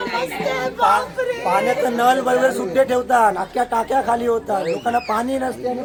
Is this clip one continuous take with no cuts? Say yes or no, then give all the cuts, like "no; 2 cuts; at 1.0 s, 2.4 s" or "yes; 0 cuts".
yes; 0 cuts